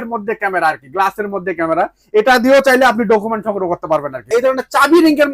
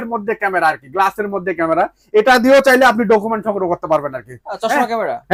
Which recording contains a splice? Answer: first; 1 cut; at 4.2 s

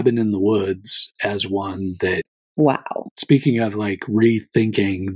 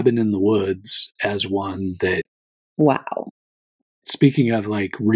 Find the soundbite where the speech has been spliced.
first; 2 cuts; at 2.4 s, 3.1 s

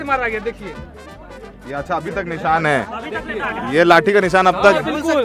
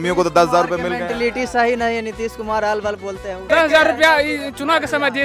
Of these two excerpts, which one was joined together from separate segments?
second; 1 cut; at 3.4 s

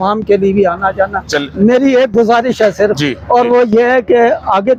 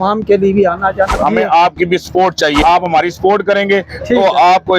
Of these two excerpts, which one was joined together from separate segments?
second; 2 cuts; at 1.1 s, 2.6 s

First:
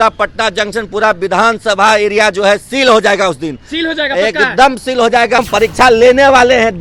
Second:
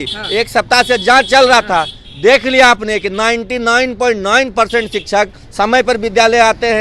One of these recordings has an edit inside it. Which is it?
first; 1 cut; at 5.4 s

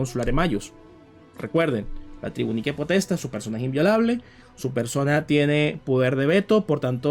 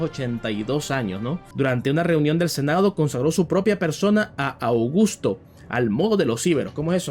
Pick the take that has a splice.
second; 1 cut; at 1.4 s

